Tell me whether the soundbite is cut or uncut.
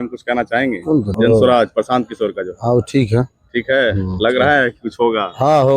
cut